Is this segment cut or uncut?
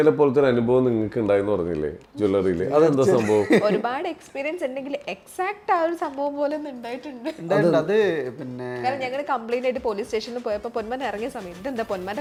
uncut